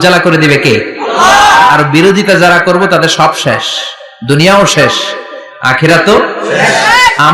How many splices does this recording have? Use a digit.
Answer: 0